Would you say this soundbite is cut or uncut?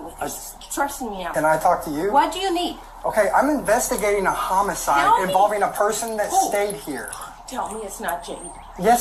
cut